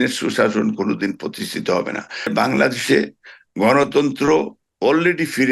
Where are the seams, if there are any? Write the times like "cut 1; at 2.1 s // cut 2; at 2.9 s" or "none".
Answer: cut 1; at 2.3 s